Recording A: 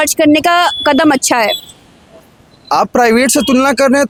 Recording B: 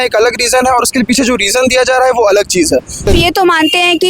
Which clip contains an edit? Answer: B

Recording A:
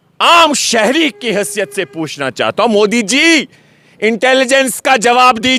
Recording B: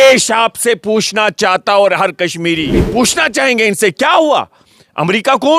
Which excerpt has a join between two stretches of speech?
B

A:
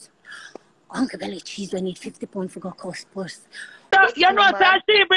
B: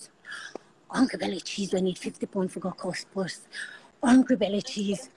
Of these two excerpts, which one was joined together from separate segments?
A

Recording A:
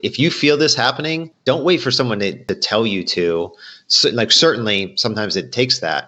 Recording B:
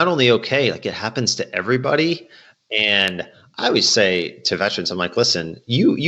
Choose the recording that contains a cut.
A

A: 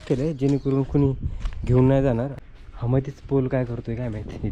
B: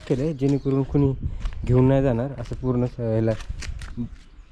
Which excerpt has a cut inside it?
A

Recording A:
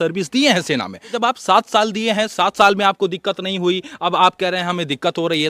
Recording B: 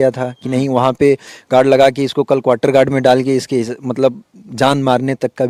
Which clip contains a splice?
A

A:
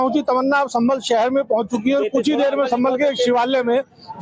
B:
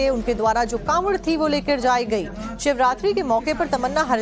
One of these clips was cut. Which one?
B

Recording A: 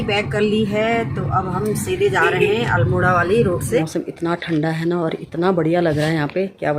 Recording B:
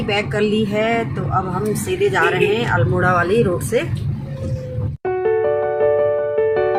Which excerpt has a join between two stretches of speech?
A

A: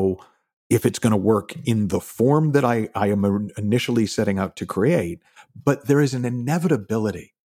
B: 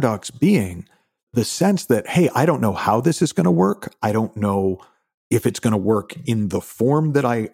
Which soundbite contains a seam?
B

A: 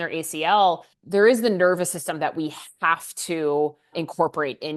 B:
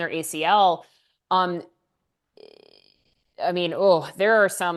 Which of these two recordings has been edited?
A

